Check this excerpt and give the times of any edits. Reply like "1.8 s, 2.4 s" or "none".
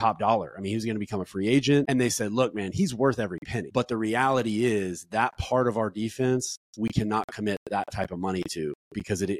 1.9 s, 3.6 s